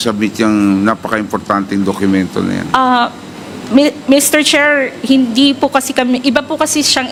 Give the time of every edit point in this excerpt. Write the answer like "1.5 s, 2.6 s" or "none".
none